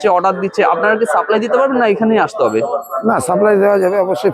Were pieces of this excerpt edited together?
no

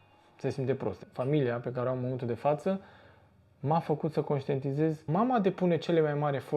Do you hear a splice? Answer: yes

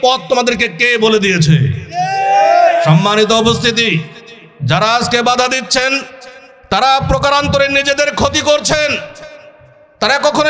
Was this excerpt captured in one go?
yes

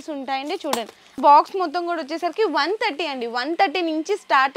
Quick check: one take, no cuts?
no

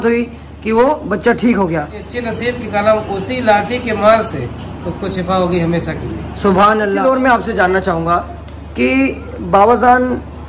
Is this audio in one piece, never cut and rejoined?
no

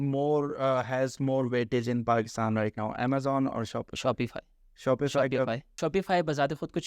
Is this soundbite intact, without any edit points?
no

